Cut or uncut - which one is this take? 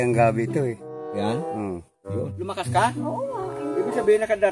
cut